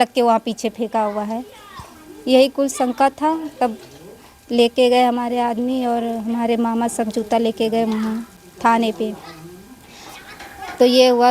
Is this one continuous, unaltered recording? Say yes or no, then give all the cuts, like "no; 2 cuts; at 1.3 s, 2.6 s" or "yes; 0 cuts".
yes; 0 cuts